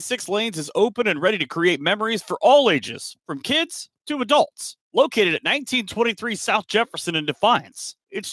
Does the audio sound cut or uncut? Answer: uncut